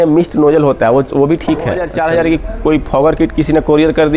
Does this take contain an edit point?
yes; 1 cut; at 1.9 s

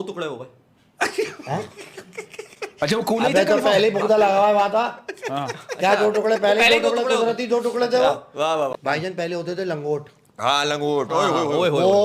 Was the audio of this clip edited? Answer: yes; 2 cuts; at 2.5 s, 8.7 s

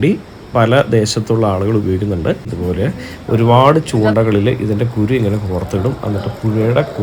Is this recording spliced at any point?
yes; 1 cut; at 2.5 s

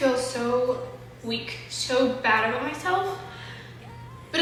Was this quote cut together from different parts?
no; 0 cuts

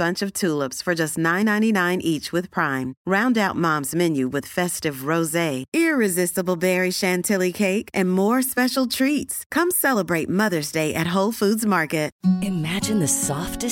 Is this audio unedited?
yes; 0 cuts

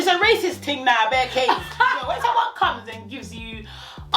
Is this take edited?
yes; 1 cut; at 2.0 s

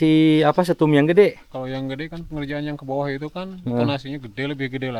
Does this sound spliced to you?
no; 0 cuts

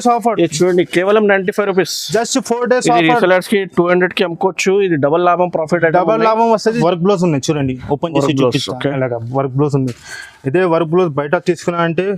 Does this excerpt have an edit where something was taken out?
yes; 1 cut; at 6.7 s

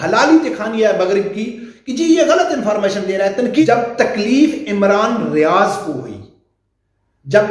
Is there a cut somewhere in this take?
yes; 1 cut; at 3.5 s

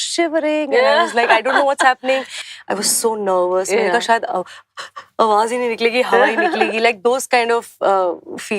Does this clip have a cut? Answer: yes; 1 cut; at 2.4 s

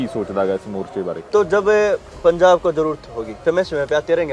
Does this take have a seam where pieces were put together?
yes; 2 cuts; at 1.2 s, 3.3 s

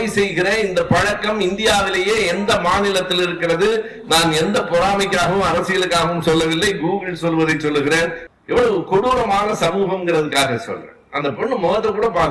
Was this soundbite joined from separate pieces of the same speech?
yes; 1 cut; at 8.2 s

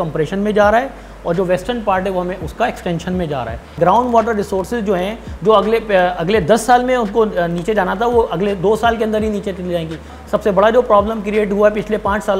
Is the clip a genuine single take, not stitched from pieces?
no; 2 cuts; at 3.7 s, 10.1 s

